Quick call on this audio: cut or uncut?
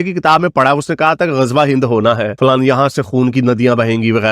cut